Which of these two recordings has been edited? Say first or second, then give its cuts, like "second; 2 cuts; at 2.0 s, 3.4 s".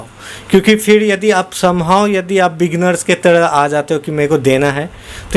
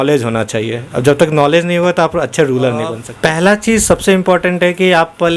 second; 1 cut; at 3.0 s